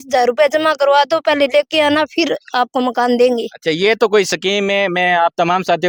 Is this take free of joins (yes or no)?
yes